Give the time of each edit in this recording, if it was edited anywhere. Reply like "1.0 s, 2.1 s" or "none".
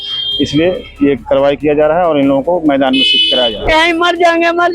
3.6 s